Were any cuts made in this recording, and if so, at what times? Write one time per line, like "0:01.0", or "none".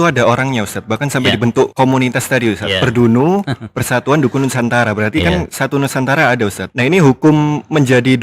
0:01.7
0:06.6